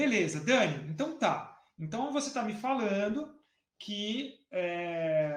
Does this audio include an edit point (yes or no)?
no